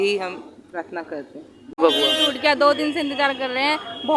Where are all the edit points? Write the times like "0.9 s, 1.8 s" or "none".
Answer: 1.8 s